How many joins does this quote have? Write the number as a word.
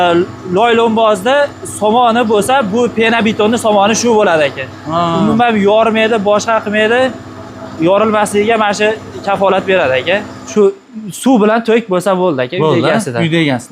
one